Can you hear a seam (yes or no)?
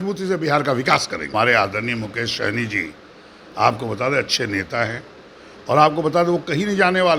yes